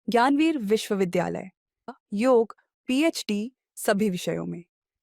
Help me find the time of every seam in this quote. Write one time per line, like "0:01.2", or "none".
0:01.9